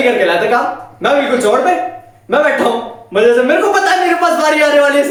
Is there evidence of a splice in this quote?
no; 0 cuts

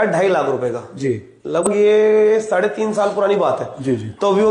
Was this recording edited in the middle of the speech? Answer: yes; 1 cut; at 1.7 s

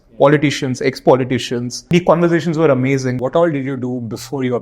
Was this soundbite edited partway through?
yes; 2 cuts; at 1.9 s, 3.2 s

